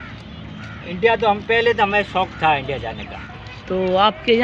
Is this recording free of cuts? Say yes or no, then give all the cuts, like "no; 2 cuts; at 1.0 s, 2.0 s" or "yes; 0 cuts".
no; 1 cut; at 3.2 s